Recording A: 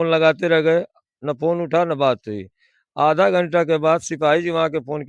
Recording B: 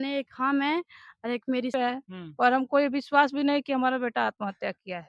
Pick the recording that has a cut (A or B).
B